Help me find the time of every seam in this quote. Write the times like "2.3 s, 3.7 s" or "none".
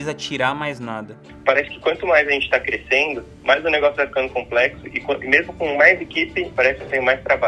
1.2 s, 3.3 s, 6.5 s

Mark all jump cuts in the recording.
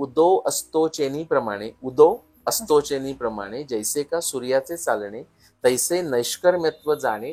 none

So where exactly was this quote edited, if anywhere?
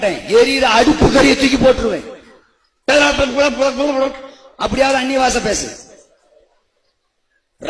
none

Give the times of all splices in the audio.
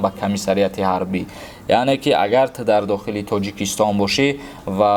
none

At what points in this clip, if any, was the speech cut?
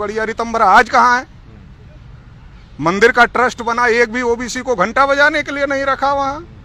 none

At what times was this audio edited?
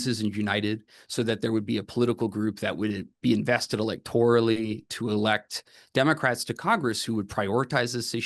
none

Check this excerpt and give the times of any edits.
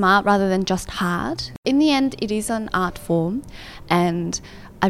1.4 s

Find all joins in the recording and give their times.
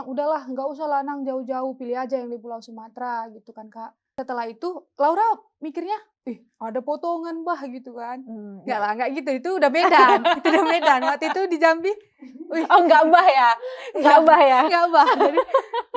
4.0 s

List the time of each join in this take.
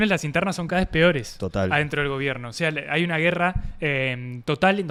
none

